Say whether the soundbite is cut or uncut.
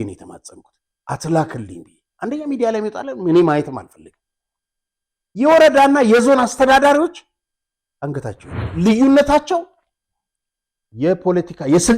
cut